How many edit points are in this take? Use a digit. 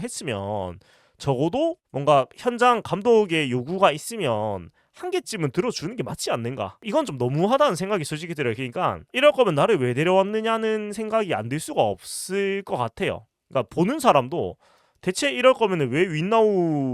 1